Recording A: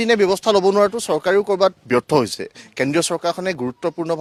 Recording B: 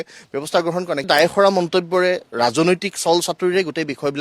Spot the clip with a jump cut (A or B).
B